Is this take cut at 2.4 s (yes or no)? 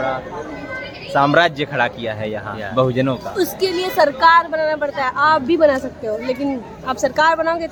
no